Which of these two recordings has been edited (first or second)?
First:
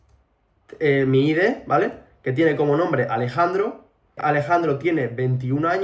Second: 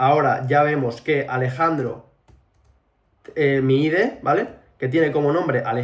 first